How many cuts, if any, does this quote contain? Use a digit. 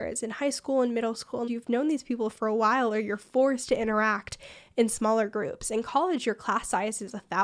1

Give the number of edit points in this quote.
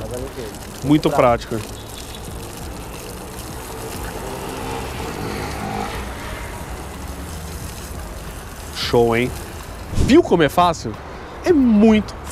0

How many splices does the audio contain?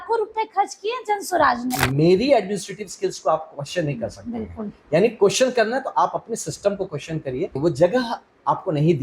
2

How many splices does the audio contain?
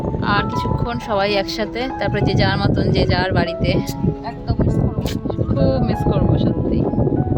0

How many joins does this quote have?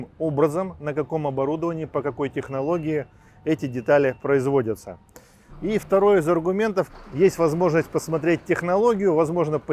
0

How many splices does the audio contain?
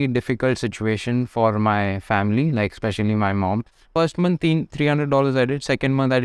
1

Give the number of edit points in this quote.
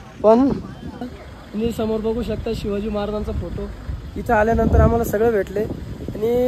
1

